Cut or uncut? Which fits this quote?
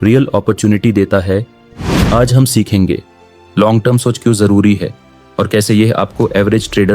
cut